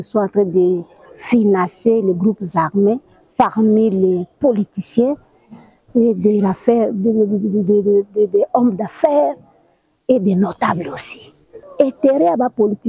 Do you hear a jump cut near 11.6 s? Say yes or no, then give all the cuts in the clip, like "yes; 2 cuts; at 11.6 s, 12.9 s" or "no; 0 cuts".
yes; 1 cut; at 11.6 s